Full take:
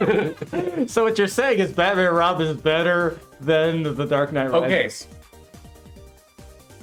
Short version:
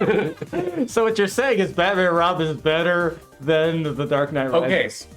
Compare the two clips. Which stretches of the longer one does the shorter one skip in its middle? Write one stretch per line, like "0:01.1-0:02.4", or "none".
none